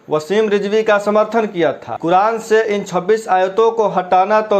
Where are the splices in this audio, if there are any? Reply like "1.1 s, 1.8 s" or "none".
1.9 s